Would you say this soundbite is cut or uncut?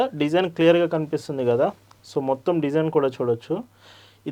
uncut